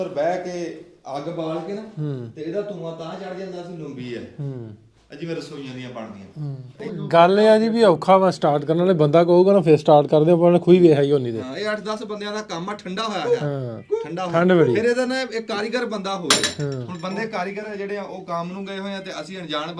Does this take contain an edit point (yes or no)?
yes